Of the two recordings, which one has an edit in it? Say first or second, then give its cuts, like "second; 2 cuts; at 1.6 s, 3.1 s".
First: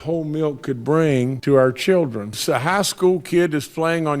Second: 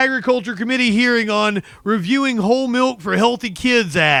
first; 2 cuts; at 1.4 s, 2.3 s